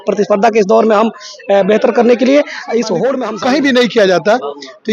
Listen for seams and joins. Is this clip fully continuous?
no; 1 cut; at 3.3 s

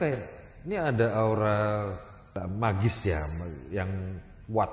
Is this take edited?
yes; 1 cut; at 2.4 s

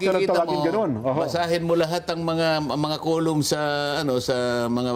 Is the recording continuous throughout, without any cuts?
yes; 0 cuts

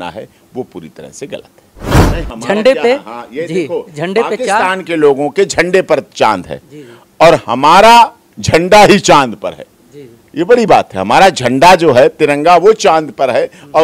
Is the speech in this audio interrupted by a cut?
yes; 1 cut; at 2.0 s

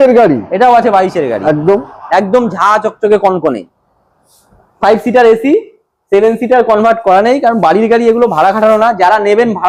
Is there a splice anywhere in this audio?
no; 0 cuts

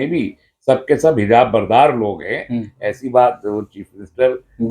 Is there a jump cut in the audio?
no; 0 cuts

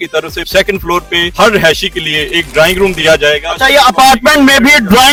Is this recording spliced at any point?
no; 0 cuts

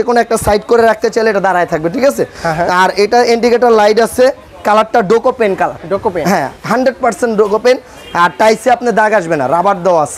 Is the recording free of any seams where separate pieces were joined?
yes; 0 cuts

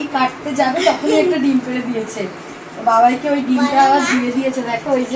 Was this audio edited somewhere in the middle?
no; 0 cuts

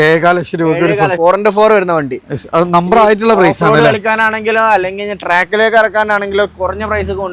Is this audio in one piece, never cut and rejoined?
no; 1 cut; at 1.1 s

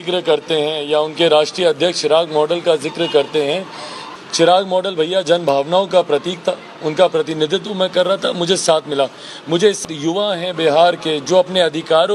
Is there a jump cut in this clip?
yes; 2 cuts; at 4.0 s, 9.8 s

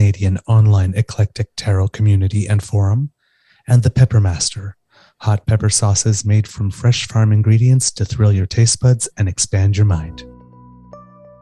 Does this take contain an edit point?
yes; 1 cut; at 10.1 s

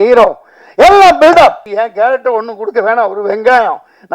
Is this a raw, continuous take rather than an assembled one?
no; 1 cut; at 1.7 s

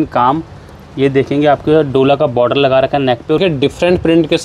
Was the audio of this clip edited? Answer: yes; 1 cut; at 3.4 s

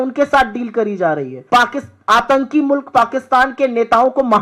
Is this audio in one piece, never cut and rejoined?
no; 1 cut; at 1.3 s

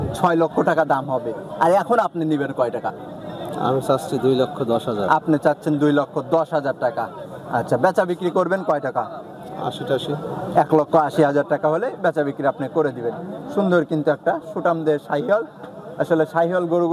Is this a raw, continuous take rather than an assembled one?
yes; 0 cuts

